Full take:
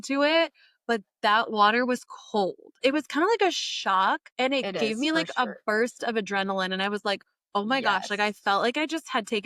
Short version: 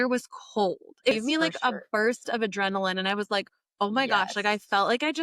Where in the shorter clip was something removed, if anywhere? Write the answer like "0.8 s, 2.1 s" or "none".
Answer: 1.1 s